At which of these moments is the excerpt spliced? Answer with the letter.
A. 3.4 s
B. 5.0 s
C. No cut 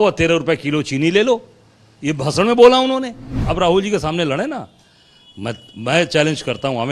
A